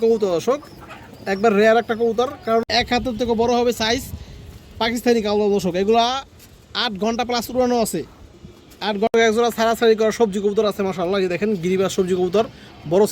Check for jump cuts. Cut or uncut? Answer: cut